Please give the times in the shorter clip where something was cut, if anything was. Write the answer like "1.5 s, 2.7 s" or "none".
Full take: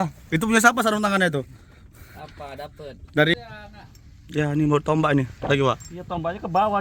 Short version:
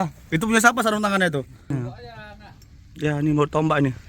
2.1 s